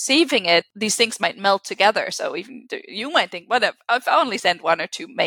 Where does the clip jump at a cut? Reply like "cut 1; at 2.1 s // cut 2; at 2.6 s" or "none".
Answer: none

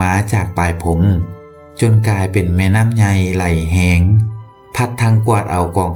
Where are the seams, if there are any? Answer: none

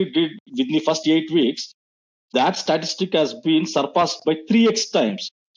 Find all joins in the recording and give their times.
none

